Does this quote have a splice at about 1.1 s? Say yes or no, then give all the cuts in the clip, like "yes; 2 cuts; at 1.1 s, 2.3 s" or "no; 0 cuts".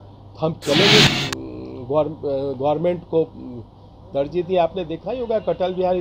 yes; 1 cut; at 1.1 s